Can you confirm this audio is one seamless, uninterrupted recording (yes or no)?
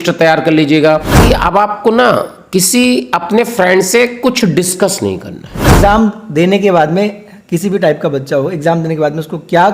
no